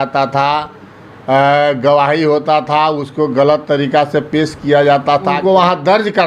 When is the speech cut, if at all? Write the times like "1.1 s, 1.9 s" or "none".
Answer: 5.4 s